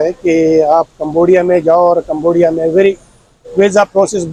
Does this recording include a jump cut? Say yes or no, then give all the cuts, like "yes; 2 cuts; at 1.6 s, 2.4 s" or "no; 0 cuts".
no; 0 cuts